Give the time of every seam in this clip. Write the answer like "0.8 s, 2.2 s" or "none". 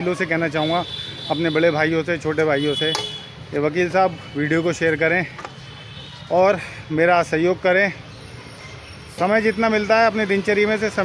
none